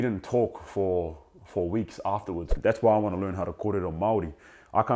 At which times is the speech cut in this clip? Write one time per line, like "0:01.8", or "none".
0:02.5